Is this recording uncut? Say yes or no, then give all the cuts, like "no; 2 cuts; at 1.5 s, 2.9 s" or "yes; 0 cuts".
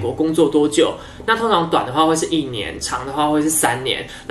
yes; 0 cuts